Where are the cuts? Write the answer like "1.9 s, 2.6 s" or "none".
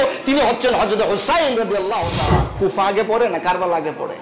2.5 s